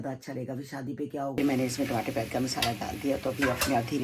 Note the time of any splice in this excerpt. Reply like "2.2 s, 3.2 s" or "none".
1.4 s